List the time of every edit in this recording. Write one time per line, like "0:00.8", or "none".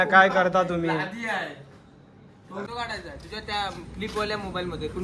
0:02.7